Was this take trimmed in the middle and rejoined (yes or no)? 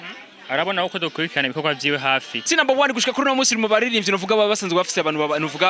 yes